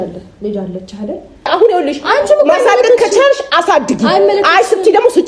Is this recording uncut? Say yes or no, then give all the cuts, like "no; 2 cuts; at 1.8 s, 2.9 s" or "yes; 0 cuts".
no; 1 cut; at 1.5 s